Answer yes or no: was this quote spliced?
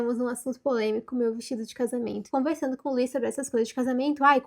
yes